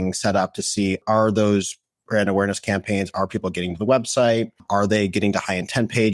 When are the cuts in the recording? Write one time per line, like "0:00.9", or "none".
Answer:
0:01.0
0:04.6

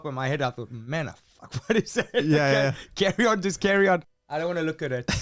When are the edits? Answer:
0:04.2

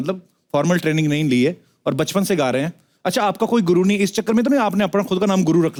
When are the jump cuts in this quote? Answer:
none

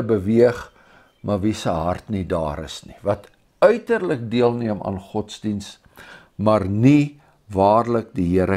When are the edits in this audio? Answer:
none

